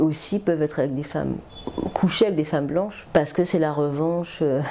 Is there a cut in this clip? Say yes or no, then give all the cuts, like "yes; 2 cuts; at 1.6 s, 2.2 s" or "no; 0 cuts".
yes; 1 cut; at 3.0 s